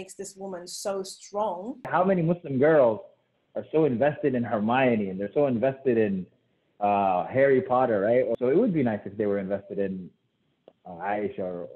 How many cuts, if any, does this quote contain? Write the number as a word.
two